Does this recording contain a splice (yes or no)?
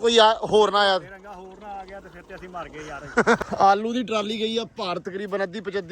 yes